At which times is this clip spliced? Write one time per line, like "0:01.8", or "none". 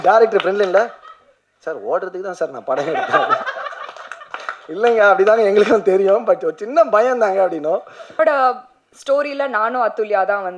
0:08.1